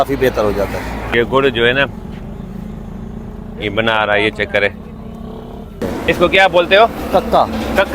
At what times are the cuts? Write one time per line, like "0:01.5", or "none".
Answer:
0:01.0
0:05.8